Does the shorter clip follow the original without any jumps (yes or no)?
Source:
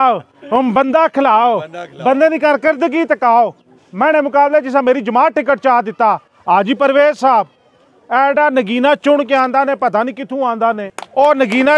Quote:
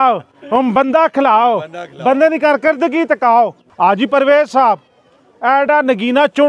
no